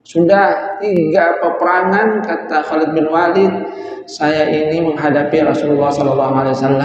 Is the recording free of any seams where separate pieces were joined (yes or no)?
no